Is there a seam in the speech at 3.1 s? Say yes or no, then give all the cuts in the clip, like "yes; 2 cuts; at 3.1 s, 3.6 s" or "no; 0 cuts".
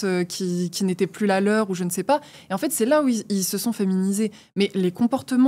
no; 0 cuts